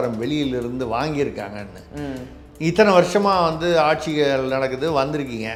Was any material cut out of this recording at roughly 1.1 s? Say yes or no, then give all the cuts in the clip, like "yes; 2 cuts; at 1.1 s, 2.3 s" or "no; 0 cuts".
no; 0 cuts